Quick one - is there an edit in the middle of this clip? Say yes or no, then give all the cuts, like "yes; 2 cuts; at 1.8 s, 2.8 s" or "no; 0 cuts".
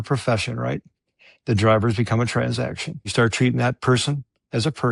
yes; 1 cut; at 3.1 s